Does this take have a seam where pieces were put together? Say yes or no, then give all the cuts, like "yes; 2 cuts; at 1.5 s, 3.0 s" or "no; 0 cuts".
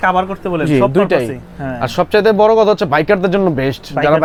no; 0 cuts